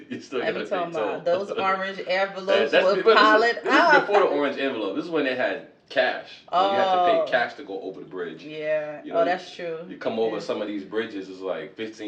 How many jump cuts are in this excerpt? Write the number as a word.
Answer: zero